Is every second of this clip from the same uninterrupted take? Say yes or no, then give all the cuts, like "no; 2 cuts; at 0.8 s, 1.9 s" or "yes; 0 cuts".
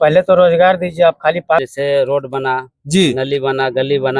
no; 1 cut; at 1.7 s